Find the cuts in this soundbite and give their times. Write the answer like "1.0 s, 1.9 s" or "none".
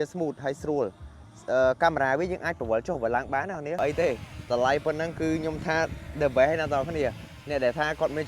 3.8 s